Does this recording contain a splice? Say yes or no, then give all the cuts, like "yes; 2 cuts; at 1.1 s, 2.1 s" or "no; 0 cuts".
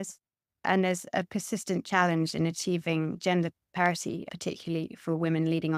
no; 0 cuts